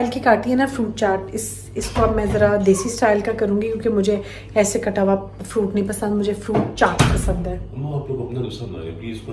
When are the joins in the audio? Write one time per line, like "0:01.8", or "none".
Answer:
none